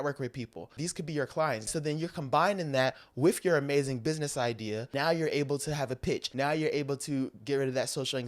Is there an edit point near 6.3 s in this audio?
yes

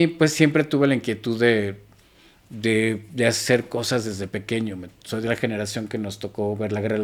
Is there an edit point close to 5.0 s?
no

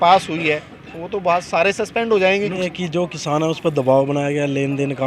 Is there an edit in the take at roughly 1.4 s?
no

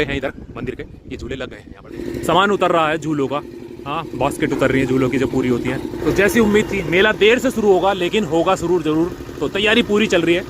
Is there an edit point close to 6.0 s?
yes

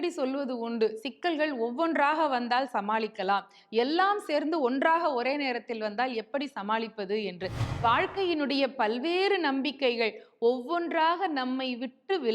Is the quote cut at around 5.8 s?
no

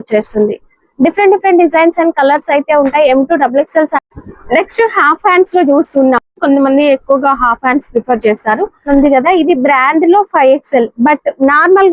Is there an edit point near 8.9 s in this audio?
yes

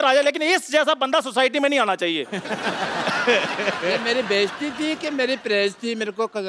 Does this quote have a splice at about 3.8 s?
no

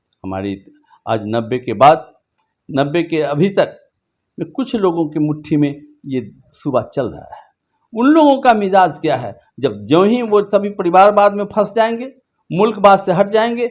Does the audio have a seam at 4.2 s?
no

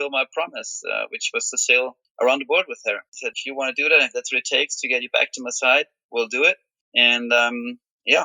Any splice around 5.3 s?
no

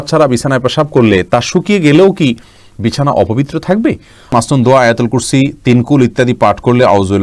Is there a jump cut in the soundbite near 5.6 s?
no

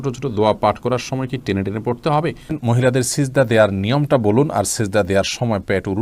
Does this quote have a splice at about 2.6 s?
yes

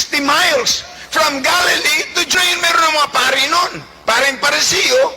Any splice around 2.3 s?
yes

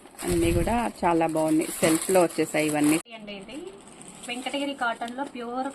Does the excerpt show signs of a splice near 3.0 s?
yes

